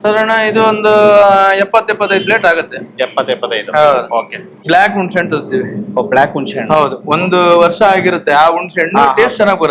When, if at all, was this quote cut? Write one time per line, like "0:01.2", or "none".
0:04.5